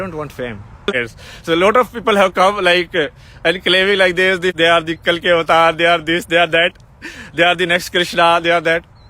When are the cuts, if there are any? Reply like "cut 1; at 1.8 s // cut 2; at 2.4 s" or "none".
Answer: cut 1; at 0.9 s // cut 2; at 4.5 s